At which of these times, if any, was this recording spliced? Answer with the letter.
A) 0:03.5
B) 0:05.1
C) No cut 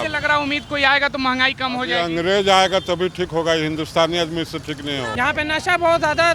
B